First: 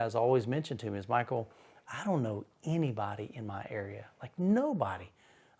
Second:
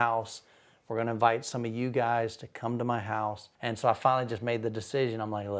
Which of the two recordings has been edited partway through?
second; 1 cut; at 3.5 s

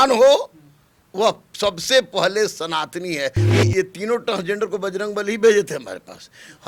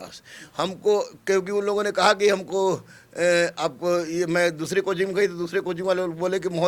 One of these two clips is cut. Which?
first; 1 cut; at 3.4 s

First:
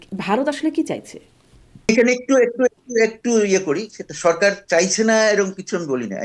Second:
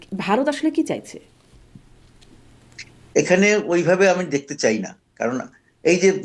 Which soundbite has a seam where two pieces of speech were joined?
first; 1 cut; at 1.9 s

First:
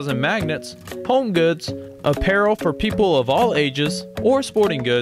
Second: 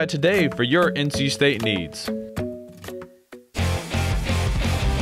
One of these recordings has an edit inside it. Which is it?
second; 1 cut; at 3.5 s

